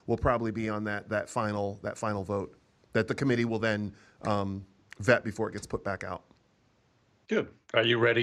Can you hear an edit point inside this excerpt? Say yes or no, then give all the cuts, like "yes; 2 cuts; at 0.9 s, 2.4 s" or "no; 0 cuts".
no; 0 cuts